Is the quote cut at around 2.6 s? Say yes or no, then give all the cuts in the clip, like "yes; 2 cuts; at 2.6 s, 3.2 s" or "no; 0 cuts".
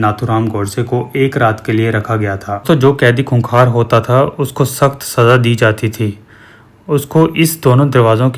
yes; 1 cut; at 2.6 s